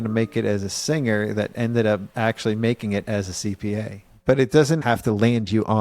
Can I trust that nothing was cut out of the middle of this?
no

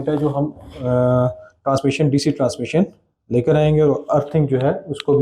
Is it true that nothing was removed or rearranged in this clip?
yes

